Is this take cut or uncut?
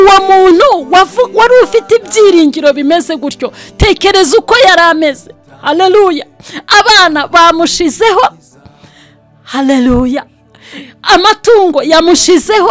uncut